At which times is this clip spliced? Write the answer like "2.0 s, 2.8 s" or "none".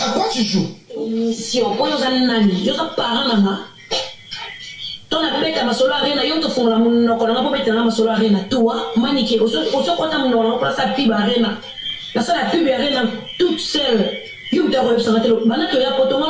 1.1 s